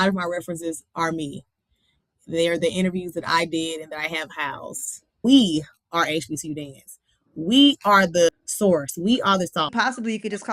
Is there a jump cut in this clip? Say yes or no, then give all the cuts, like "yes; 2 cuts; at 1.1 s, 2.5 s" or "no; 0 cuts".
yes; 3 cuts; at 5.2 s, 8.3 s, 9.7 s